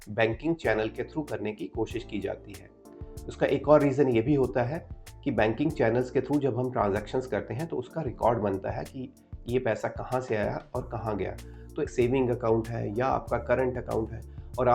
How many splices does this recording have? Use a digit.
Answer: 1